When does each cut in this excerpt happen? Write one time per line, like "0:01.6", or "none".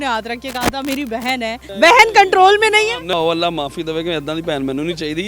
0:01.6
0:03.1